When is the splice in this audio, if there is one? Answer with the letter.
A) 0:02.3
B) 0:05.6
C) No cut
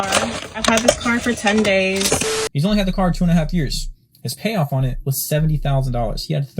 A